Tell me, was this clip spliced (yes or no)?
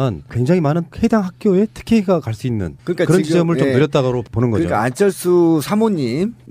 yes